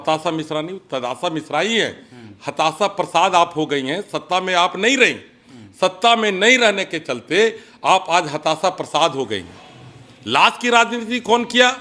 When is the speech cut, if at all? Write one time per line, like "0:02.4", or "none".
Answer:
none